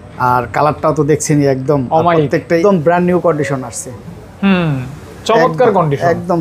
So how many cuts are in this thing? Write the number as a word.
one